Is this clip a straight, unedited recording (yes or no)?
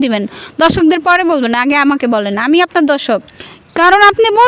no